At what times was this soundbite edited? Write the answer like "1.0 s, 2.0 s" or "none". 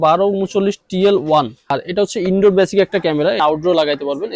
1.7 s, 3.4 s